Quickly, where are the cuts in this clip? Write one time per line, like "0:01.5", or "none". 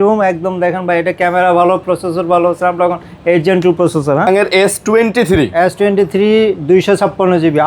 0:04.3

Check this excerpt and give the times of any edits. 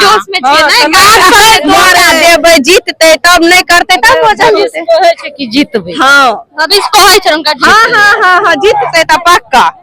0:02.1

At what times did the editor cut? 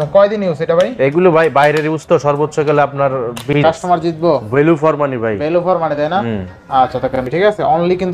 0:03.6
0:07.2

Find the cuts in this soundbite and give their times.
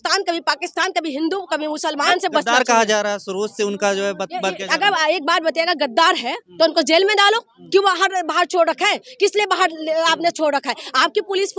0:02.1

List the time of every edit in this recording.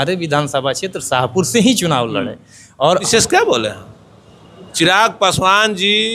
0:03.1

